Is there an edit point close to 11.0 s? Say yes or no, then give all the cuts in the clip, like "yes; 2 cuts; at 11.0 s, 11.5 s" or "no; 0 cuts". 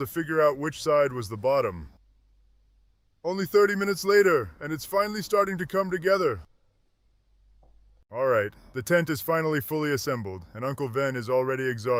no; 0 cuts